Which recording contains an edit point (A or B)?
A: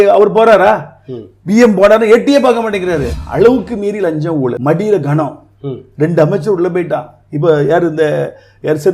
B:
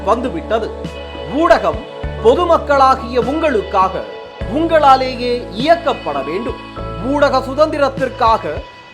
A